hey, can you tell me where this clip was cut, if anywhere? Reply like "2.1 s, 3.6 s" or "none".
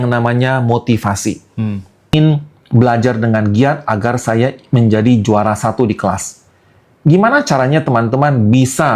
2.1 s